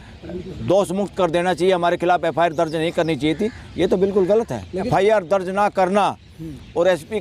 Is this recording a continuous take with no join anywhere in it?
no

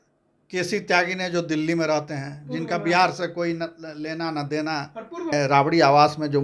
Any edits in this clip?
yes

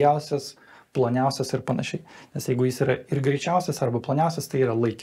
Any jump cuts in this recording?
no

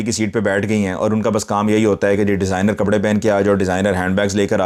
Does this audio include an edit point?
no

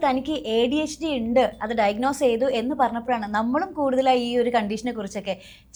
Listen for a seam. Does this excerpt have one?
no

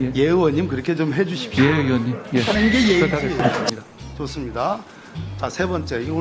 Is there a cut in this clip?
yes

